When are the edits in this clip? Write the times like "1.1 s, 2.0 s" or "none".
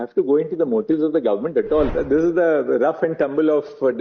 1.9 s